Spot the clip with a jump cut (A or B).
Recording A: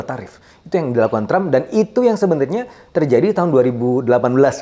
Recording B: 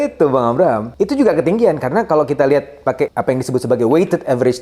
B